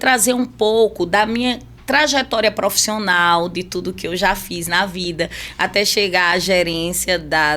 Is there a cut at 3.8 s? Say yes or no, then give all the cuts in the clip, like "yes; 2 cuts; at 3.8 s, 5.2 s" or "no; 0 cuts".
no; 1 cut; at 5.4 s